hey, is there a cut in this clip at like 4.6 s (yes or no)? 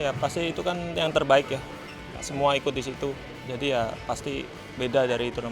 yes